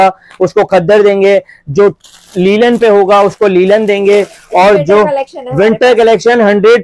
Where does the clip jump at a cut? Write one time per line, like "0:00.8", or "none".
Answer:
none